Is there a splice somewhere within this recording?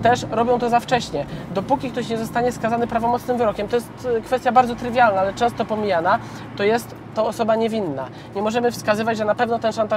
yes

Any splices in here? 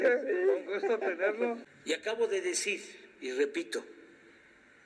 yes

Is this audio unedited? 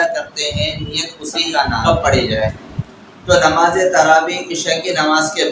no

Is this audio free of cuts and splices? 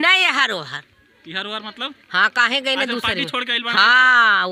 yes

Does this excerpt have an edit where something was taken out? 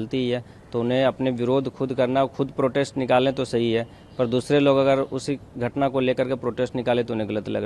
no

